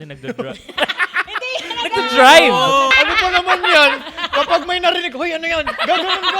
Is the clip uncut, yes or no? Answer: no